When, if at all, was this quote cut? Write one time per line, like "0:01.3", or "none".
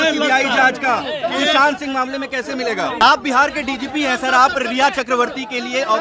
0:03.0